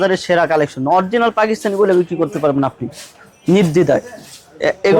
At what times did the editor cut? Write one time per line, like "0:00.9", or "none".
none